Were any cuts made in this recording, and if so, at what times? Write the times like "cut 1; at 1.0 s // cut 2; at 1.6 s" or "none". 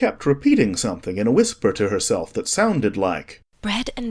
cut 1; at 1.3 s